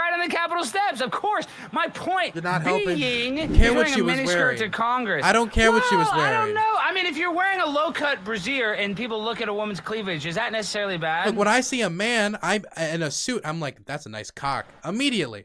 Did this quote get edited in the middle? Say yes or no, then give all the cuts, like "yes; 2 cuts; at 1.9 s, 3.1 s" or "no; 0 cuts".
yes; 1 cut; at 3.5 s